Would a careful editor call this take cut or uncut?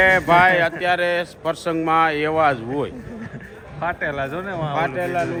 uncut